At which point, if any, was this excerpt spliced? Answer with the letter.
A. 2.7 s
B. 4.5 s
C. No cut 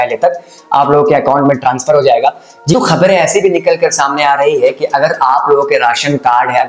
A